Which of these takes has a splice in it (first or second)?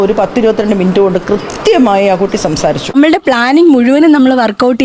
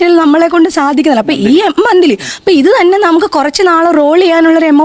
first